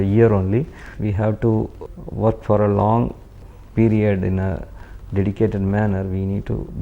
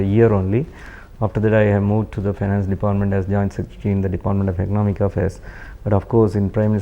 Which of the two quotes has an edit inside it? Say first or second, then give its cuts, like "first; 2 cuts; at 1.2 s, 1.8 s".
first; 1 cut; at 1.0 s